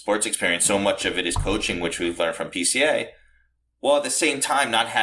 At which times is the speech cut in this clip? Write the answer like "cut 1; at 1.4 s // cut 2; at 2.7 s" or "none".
none

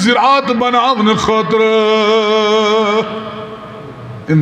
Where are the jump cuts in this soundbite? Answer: none

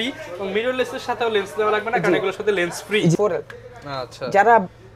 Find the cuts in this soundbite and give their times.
cut 1; at 3.1 s

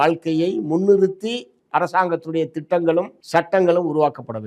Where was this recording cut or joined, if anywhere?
cut 1; at 3.2 s

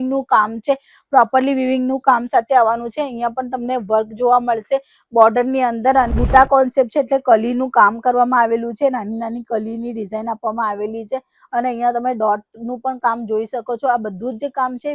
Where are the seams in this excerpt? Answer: cut 1; at 6.1 s

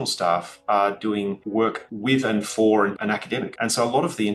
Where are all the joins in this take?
cut 1; at 1.4 s // cut 2; at 3.0 s

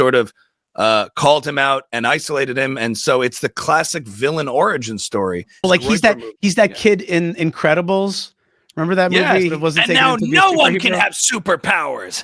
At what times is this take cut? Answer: cut 1; at 5.6 s // cut 2; at 9.6 s

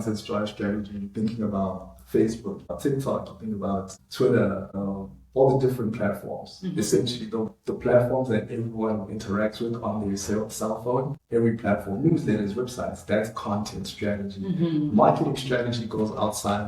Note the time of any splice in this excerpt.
cut 1; at 2.7 s // cut 2; at 4.0 s // cut 3; at 4.7 s // cut 4; at 11.2 s

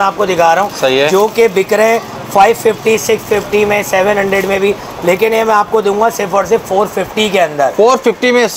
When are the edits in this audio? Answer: none

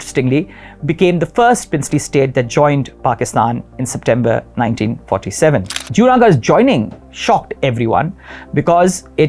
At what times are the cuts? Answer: none

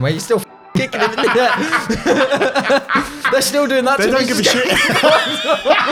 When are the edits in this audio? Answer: none

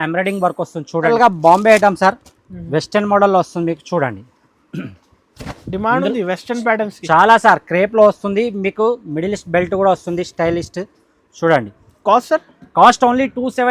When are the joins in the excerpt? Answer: cut 1; at 1.1 s

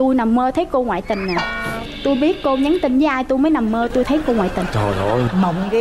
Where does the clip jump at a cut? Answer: none

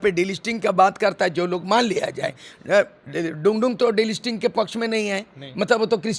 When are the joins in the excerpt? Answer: none

